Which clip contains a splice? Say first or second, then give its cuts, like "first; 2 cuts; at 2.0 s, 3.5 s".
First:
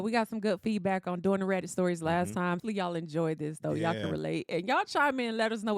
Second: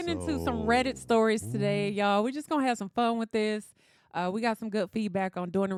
first; 1 cut; at 2.6 s